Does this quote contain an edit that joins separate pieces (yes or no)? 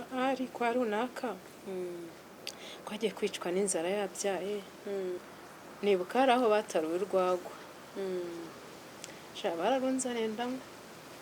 yes